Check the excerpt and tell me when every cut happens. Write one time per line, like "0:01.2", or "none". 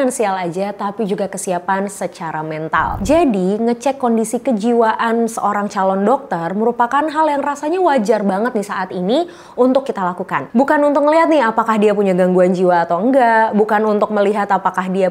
0:03.0